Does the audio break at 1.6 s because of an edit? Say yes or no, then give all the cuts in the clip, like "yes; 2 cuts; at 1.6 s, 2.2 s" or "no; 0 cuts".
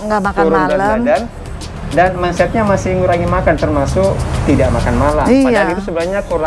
no; 0 cuts